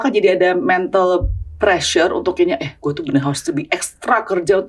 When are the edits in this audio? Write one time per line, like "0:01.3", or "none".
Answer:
none